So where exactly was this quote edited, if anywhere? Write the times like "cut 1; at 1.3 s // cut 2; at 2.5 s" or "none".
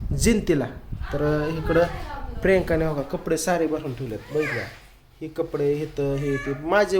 none